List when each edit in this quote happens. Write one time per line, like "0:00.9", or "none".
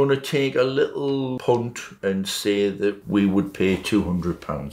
0:01.4